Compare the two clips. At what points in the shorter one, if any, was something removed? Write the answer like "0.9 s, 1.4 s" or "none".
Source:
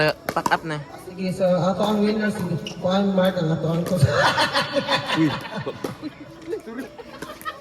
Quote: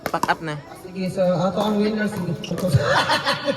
2.5 s

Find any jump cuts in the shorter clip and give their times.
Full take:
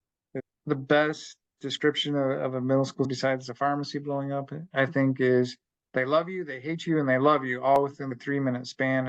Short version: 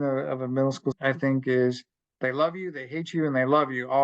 1.0 s

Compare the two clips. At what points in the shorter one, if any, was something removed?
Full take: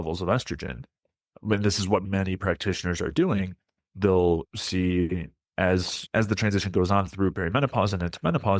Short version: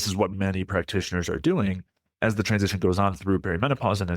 2.0 s

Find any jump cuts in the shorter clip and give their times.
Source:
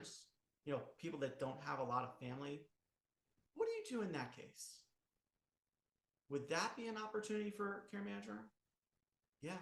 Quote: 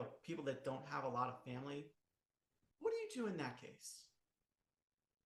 none

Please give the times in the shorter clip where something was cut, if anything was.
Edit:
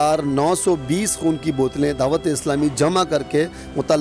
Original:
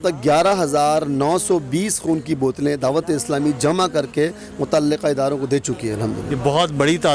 none

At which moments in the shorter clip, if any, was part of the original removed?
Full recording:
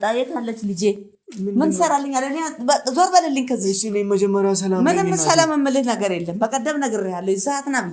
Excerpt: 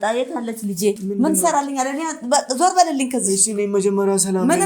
1.0 s

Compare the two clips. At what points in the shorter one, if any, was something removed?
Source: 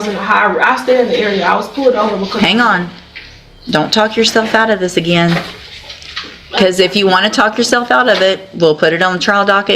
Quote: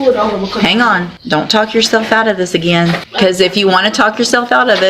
1.1 s, 3.1 s

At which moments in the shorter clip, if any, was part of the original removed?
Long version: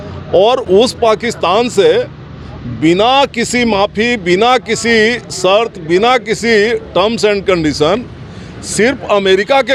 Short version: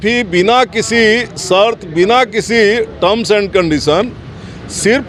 none

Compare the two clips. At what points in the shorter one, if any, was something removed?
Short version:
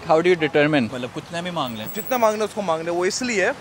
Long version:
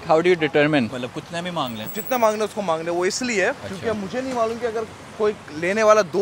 none

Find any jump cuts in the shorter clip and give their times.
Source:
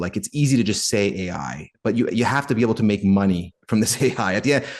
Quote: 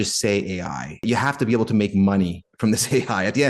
1.0 s

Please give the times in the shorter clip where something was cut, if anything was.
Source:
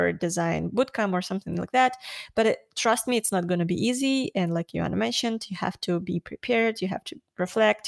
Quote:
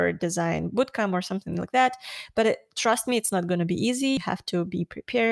4.2 s

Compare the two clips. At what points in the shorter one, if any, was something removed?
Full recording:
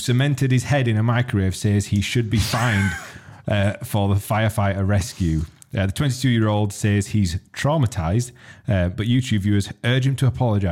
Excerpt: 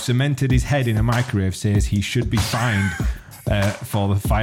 none

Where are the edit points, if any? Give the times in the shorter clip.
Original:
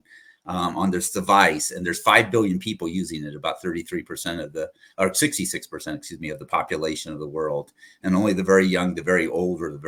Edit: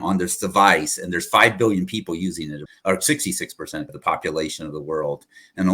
2.6 s, 3.9 s

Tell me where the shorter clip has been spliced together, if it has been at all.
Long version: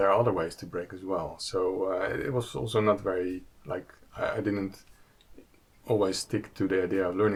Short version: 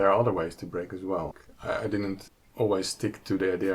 1.4 s, 2.4 s

